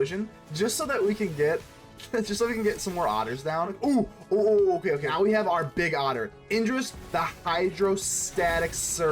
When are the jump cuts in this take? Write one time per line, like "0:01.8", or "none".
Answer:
0:03.8
0:05.1